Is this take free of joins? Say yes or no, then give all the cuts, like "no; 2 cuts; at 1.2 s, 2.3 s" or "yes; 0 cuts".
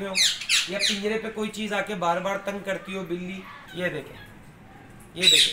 no; 1 cut; at 3.6 s